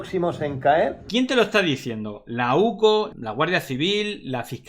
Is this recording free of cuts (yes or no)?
no